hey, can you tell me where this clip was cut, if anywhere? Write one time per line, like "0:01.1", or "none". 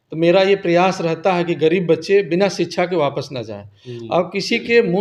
none